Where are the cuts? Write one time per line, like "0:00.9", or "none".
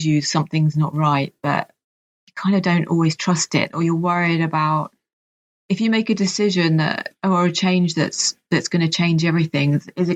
none